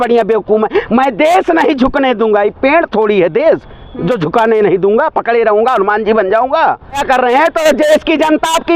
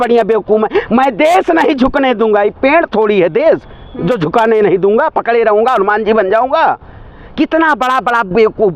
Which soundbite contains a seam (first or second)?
first